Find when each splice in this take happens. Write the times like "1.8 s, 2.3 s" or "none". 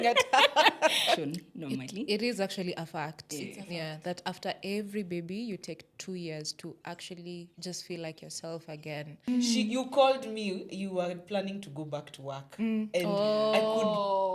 1.2 s, 9.3 s

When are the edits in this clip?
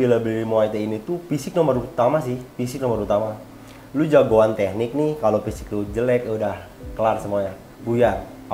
none

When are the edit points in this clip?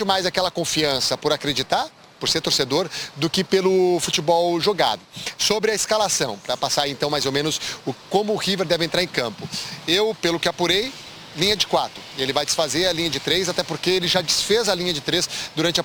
none

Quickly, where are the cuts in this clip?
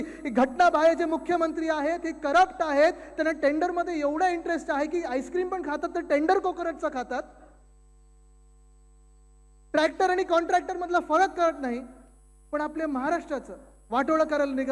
none

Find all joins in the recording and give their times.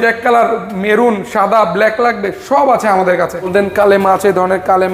3.5 s

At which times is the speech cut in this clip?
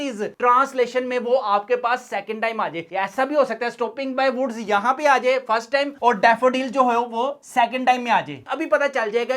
2.8 s, 8.5 s

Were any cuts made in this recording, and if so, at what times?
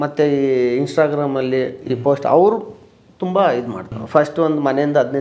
3.9 s

